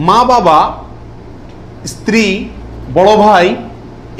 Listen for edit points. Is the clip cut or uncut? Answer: uncut